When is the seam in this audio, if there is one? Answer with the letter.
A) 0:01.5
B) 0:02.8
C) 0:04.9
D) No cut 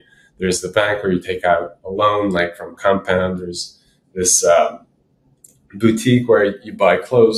D